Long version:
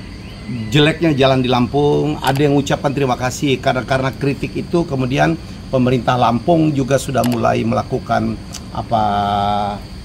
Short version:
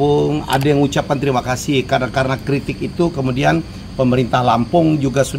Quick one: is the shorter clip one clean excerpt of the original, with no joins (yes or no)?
yes